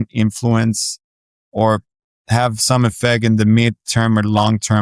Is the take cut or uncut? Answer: uncut